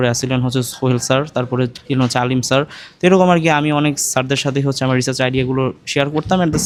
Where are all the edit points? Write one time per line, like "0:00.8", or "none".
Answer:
none